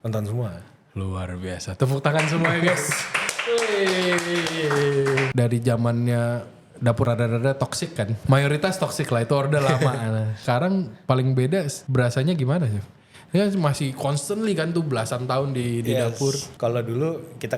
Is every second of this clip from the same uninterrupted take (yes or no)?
no